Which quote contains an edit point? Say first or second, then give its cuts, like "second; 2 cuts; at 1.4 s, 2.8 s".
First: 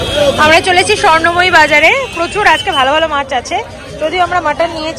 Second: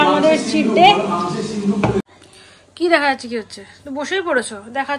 second; 1 cut; at 2.0 s